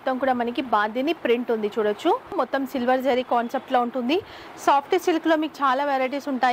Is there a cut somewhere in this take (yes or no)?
yes